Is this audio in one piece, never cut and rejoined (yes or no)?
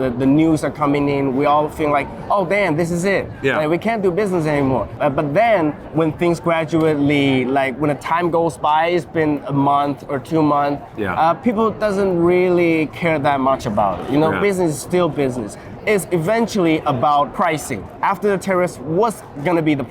no